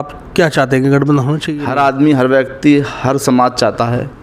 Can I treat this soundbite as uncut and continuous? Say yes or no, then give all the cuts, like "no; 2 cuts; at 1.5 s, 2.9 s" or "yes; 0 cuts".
no; 1 cut; at 1.4 s